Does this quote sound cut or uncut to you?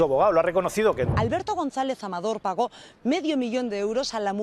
cut